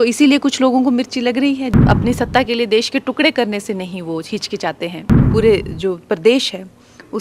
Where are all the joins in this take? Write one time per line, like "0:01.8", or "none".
0:01.8
0:05.1